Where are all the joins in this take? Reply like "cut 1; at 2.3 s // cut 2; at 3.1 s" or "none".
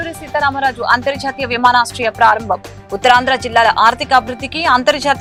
none